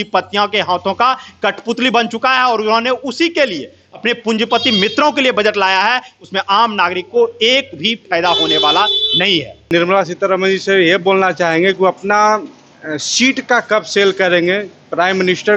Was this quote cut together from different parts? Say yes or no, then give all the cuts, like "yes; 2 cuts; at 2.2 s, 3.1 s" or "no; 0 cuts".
no; 0 cuts